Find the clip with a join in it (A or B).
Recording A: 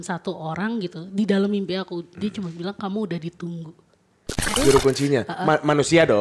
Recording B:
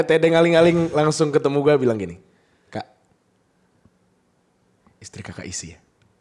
A